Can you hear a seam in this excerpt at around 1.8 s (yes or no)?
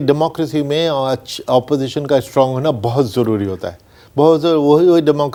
no